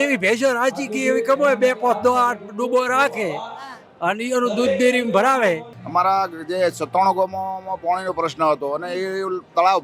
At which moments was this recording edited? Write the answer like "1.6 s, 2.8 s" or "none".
5.7 s

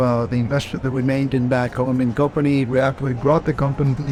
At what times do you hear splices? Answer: none

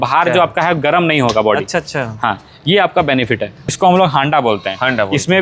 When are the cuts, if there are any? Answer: 3.6 s

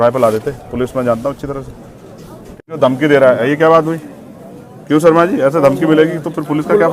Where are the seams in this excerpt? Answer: 2.7 s

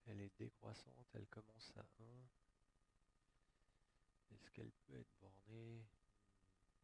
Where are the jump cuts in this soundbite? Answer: 1.2 s

